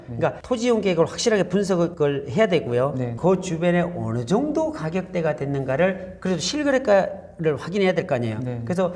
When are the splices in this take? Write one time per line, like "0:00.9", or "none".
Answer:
0:03.1